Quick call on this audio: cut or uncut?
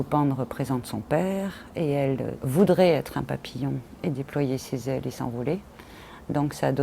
cut